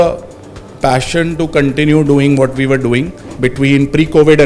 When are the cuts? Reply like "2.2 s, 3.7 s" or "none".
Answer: 3.2 s